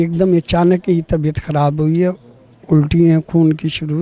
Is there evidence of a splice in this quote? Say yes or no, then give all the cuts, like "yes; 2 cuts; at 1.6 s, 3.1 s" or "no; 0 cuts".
no; 0 cuts